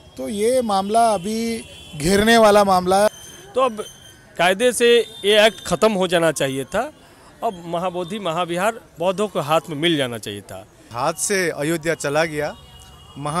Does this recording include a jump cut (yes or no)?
yes